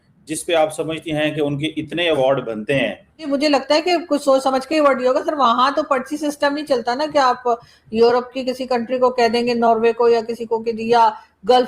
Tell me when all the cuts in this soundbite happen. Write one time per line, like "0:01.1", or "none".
0:03.2